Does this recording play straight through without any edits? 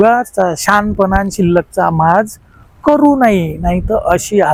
yes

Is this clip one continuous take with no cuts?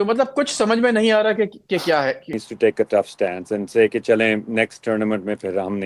no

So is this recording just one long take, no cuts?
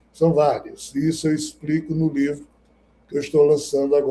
yes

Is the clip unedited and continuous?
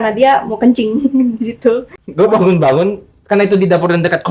no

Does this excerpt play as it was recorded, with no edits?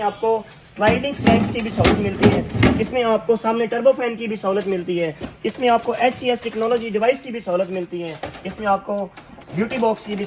yes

